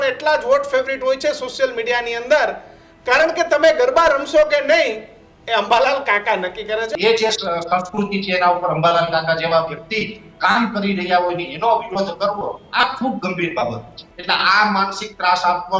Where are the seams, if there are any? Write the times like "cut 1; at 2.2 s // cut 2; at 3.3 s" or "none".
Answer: cut 1; at 6.9 s // cut 2; at 14.0 s